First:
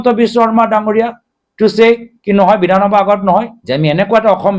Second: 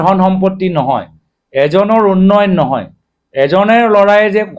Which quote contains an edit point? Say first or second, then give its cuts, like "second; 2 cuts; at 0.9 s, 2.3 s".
first; 1 cut; at 3.6 s